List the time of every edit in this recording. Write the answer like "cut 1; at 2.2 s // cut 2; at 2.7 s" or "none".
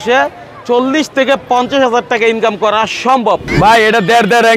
cut 1; at 3.5 s